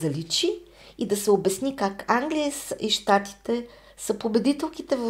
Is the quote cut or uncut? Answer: uncut